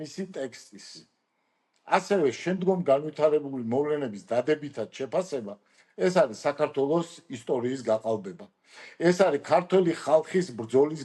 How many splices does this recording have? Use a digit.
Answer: 0